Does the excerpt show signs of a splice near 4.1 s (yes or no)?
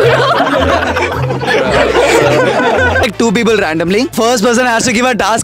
yes